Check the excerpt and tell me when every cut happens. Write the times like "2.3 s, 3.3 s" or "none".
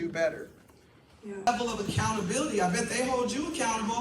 1.5 s